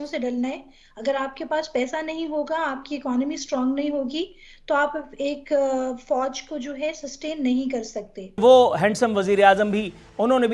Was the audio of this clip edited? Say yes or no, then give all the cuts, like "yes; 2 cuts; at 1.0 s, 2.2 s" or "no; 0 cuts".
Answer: yes; 1 cut; at 8.4 s